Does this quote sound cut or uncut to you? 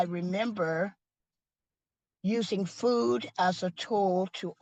uncut